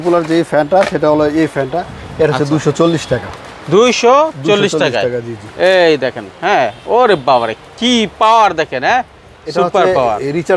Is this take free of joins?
yes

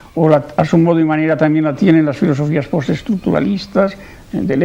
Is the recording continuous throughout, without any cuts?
no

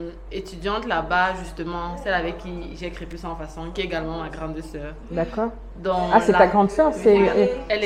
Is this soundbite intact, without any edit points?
yes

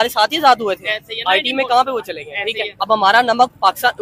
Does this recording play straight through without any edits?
no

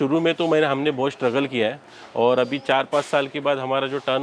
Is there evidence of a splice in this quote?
no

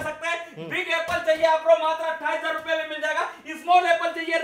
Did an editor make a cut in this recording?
no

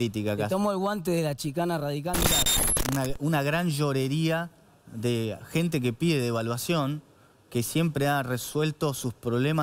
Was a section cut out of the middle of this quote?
yes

